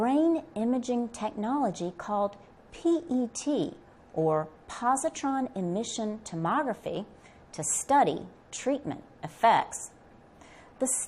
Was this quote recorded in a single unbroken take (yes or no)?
no